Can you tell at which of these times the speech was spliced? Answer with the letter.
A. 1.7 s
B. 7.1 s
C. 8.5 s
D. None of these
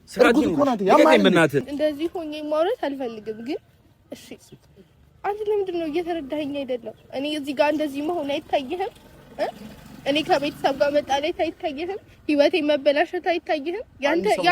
A